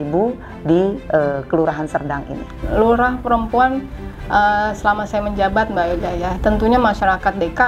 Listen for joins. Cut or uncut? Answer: cut